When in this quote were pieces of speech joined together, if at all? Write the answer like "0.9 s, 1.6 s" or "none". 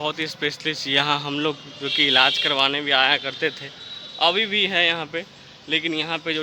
none